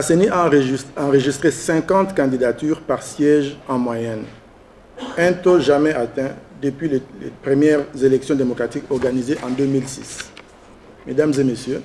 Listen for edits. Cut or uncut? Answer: uncut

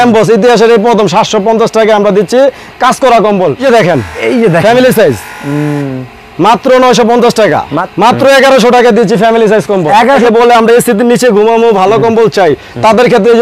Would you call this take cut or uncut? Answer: cut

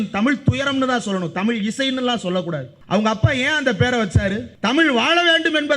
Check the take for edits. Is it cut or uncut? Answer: cut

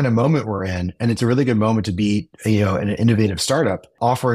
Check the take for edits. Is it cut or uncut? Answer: uncut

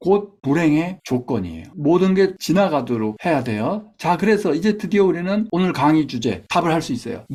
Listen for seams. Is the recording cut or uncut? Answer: uncut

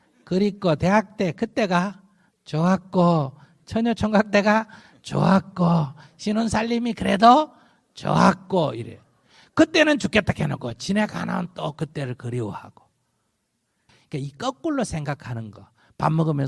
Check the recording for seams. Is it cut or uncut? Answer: uncut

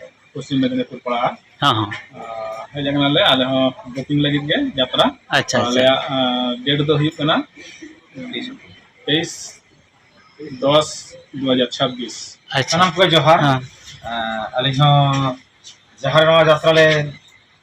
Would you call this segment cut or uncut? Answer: cut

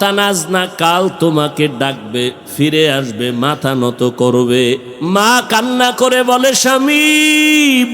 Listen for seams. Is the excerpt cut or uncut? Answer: cut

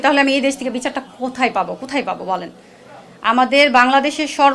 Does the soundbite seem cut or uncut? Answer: uncut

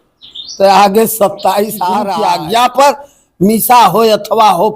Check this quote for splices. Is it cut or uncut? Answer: cut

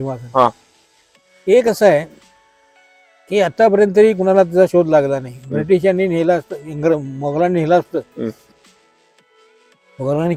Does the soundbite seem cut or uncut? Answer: uncut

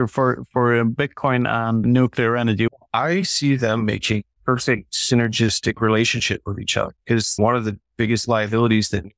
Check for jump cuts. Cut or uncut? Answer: cut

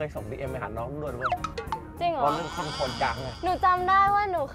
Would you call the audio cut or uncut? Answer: cut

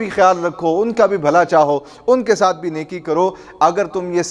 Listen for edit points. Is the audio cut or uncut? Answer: uncut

